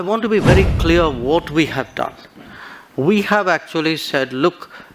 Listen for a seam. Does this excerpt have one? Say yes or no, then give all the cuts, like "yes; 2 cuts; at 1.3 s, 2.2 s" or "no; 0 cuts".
no; 0 cuts